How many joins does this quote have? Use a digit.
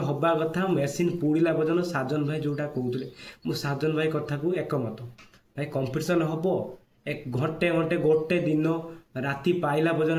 0